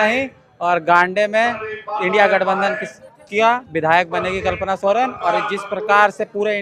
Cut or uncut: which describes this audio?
uncut